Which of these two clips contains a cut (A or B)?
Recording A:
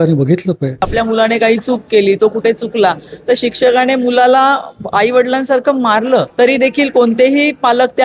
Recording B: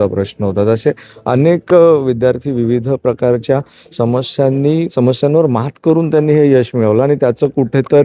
A